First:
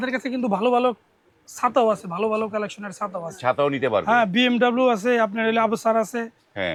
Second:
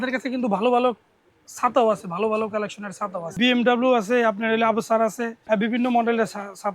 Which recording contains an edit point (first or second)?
second